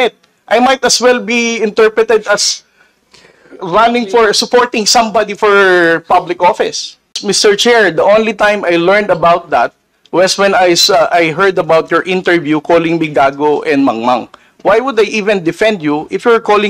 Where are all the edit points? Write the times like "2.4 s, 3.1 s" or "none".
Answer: 7.2 s